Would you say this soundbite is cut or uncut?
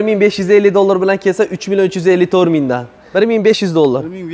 cut